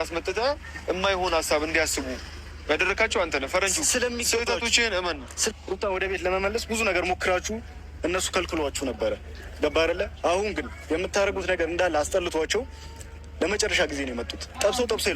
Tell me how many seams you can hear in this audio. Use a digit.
1